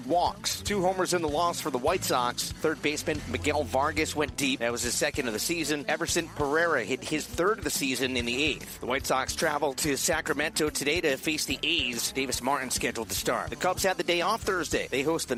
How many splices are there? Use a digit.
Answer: 0